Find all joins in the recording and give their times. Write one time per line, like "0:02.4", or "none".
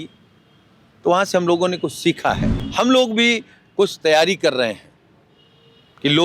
0:02.5